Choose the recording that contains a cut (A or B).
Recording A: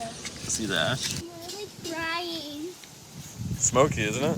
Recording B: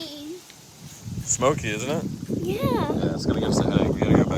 A